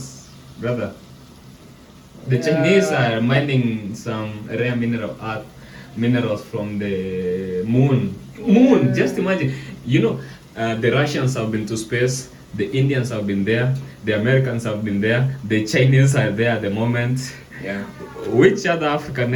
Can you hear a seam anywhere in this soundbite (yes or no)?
no